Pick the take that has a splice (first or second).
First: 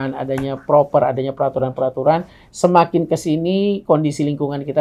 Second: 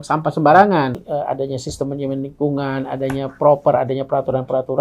second